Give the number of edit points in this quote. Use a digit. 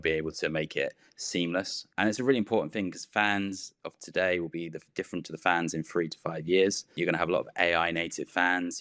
2